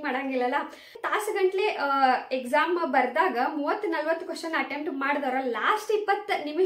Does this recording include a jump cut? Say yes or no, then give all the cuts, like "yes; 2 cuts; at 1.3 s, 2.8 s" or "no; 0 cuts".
yes; 1 cut; at 1.0 s